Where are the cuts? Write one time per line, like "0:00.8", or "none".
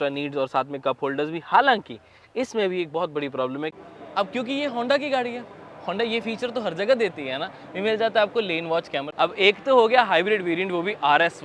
0:03.7
0:09.1